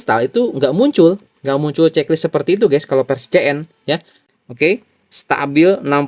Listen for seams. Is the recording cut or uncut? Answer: cut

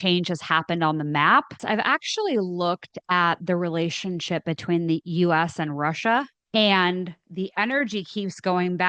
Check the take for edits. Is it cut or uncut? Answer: cut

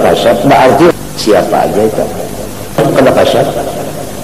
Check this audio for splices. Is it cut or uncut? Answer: cut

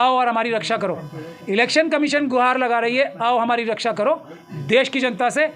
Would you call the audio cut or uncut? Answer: uncut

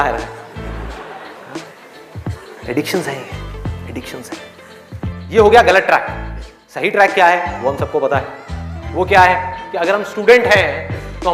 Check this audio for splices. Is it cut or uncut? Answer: uncut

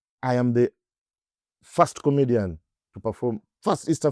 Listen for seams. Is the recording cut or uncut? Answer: uncut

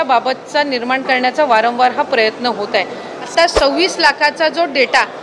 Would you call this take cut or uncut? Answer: cut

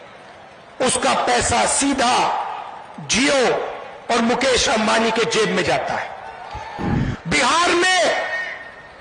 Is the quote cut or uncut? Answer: cut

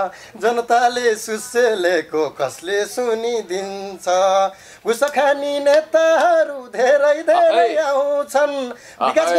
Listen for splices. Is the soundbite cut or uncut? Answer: uncut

